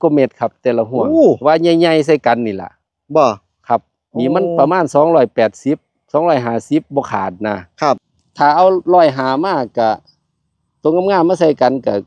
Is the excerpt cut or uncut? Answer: cut